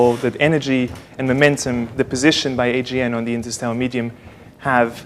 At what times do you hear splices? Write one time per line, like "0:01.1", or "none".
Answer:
0:03.4